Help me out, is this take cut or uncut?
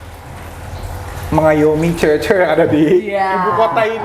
uncut